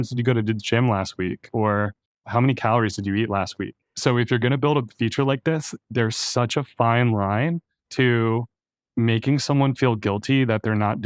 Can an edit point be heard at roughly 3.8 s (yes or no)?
yes